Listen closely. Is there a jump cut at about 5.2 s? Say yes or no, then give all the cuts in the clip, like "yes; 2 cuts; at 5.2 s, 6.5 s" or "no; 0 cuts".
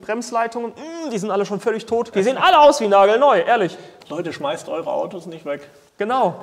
no; 2 cuts; at 2.1 s, 3.9 s